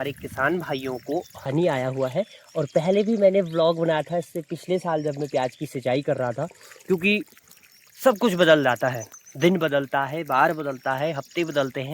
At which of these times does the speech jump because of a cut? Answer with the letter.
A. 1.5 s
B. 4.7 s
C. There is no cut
A